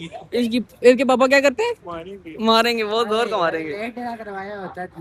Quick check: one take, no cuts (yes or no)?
yes